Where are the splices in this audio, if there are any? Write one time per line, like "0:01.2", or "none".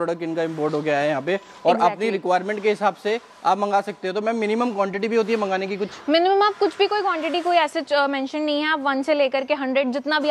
none